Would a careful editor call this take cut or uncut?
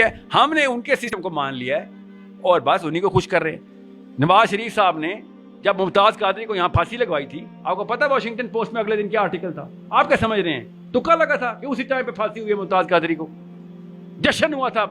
cut